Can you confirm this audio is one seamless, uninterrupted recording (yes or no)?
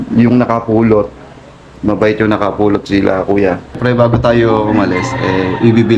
no